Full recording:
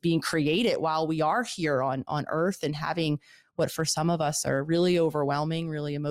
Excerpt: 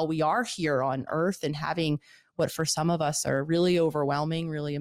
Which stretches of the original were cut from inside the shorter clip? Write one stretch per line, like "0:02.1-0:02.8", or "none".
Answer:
0:02.1-0:02.3